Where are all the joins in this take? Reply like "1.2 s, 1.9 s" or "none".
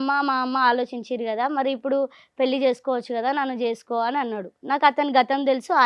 none